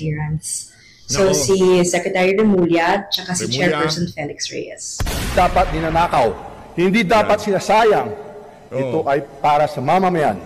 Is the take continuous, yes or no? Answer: no